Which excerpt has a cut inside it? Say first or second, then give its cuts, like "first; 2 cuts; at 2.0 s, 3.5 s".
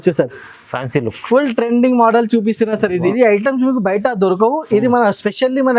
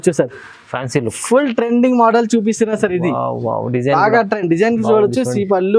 first; 1 cut; at 3.1 s